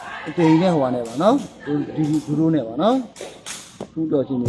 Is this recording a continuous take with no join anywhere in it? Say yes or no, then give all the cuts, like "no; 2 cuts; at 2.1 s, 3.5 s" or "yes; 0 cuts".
yes; 0 cuts